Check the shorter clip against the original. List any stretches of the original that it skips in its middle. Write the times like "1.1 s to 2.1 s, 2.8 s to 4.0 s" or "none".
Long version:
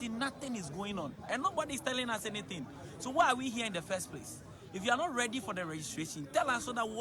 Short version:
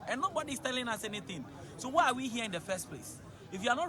none

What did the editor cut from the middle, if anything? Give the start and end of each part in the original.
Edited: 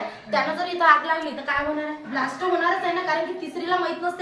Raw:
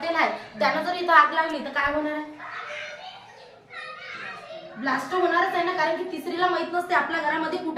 2.3 s to 4.7 s

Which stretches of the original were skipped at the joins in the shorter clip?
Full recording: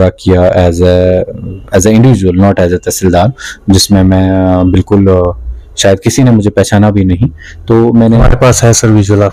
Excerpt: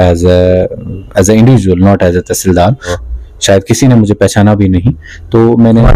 3.5 s to 5.3 s

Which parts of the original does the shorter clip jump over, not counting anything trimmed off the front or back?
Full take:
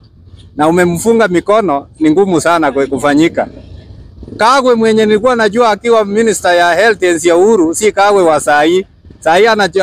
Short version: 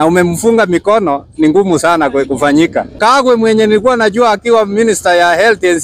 3.5 s to 4.3 s

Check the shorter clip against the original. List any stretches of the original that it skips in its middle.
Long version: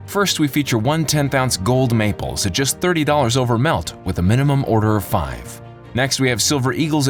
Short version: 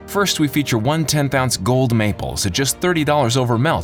none

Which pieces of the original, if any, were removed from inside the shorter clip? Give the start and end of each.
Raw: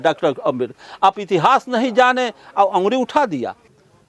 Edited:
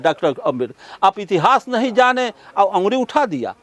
none

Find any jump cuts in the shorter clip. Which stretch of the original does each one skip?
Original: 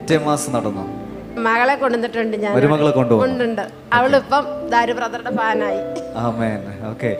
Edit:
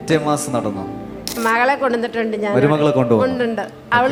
none

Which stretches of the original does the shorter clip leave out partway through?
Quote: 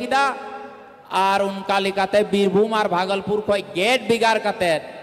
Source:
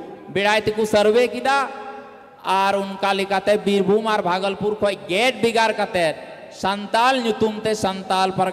none

